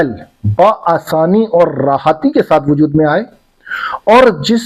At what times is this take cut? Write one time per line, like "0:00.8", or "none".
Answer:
none